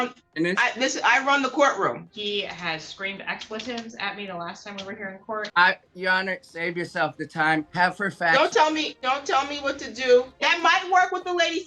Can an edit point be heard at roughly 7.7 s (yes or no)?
yes